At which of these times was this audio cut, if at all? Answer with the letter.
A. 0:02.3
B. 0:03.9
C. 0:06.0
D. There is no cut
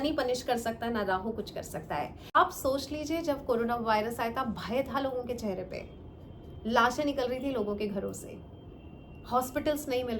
A